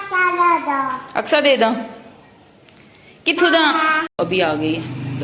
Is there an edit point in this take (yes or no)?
yes